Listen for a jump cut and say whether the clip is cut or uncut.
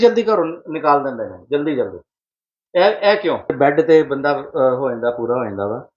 cut